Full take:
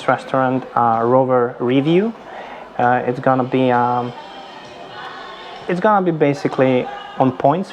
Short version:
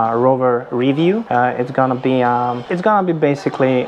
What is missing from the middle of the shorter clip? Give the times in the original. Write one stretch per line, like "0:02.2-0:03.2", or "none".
0:02.1-0:02.7
0:04.1-0:05.6